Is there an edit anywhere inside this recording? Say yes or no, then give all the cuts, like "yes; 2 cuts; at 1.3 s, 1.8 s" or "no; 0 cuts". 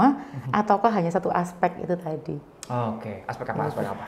no; 0 cuts